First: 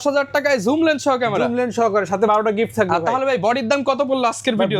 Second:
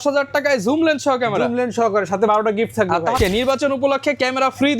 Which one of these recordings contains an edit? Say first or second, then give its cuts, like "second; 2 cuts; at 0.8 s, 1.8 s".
second; 1 cut; at 3.2 s